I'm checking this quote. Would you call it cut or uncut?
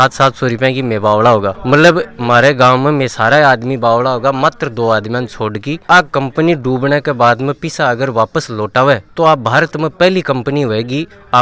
uncut